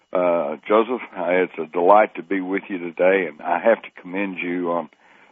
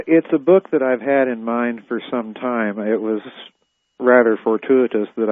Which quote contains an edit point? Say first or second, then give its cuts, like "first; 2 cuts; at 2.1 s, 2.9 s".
first; 1 cut; at 3.4 s